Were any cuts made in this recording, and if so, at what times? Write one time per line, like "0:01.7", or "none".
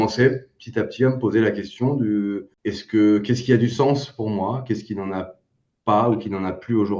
0:02.5

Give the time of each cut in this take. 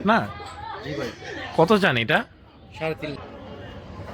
0:03.2

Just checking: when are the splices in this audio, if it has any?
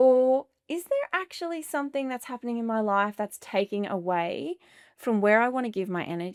none

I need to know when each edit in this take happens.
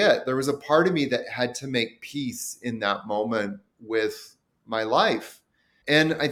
none

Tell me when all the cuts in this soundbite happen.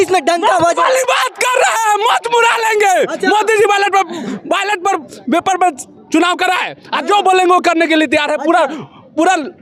none

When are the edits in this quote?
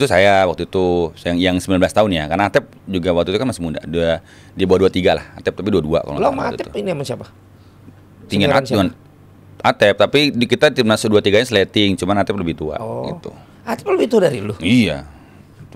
none

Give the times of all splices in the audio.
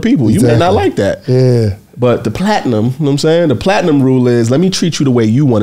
none

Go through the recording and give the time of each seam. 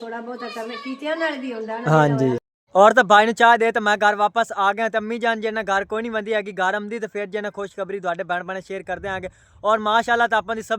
0:02.5

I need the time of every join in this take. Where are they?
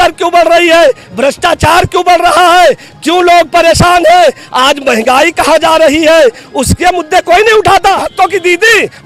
0:08.1

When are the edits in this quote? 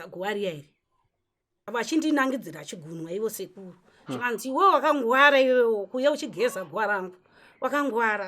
0:01.6

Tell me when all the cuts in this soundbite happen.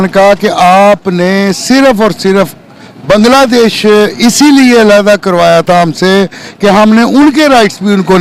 none

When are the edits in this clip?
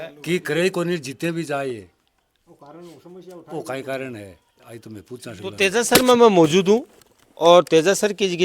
0:05.6

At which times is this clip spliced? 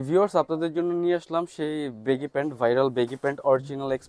none

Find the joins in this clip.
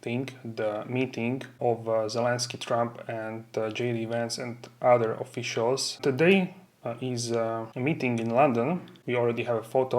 0:01.6
0:06.0
0:07.7
0:08.9

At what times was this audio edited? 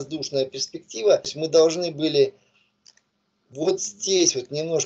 0:01.4

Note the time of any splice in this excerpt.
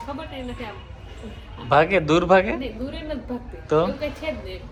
none

